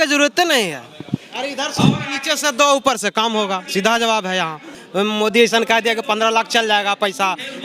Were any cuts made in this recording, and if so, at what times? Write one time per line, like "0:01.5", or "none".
0:04.8